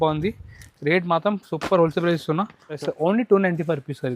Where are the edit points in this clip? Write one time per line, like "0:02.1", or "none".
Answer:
0:02.7